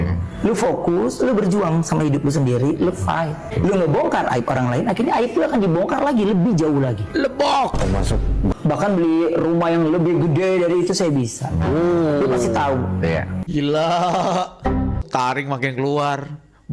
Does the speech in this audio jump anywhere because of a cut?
yes; 4 cuts; at 3.5 s, 8.5 s, 13.4 s, 15.0 s

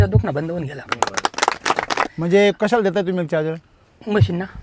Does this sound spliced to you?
yes; 2 cuts; at 0.9 s, 2.1 s

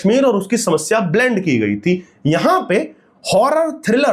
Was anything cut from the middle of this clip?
no; 0 cuts

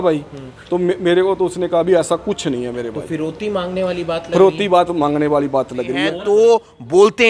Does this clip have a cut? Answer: yes; 1 cut; at 6.1 s

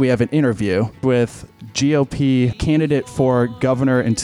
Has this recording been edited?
yes; 2 cuts; at 1.0 s, 2.6 s

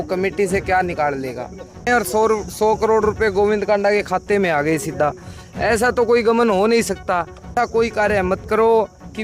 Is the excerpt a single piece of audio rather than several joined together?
no; 2 cuts; at 1.9 s, 7.5 s

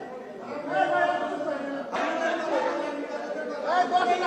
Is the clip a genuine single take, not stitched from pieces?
no; 1 cut; at 2.0 s

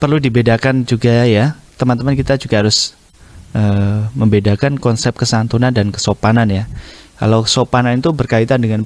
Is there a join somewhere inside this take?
no; 0 cuts

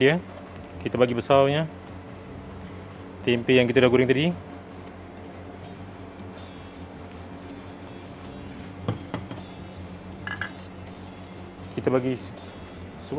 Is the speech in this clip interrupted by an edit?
no; 0 cuts

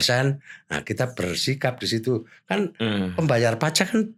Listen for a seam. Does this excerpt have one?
no; 0 cuts

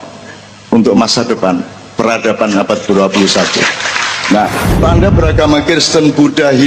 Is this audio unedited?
no; 1 cut; at 4.8 s

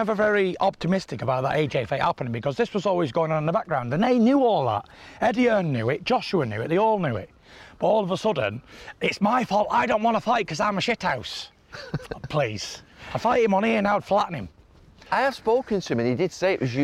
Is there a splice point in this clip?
no; 0 cuts

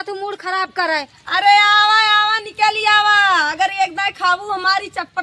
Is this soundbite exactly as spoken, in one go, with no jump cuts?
yes; 0 cuts

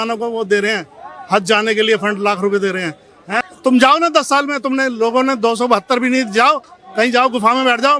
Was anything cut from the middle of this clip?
yes; 1 cut; at 3.4 s

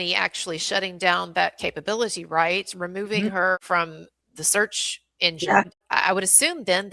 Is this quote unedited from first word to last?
no; 2 cuts; at 3.6 s, 5.8 s

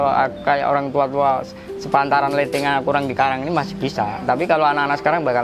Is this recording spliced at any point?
no; 0 cuts

